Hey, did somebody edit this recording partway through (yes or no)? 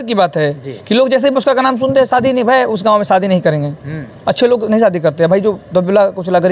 no